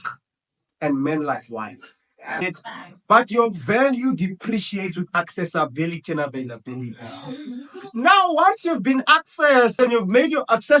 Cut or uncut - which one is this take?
cut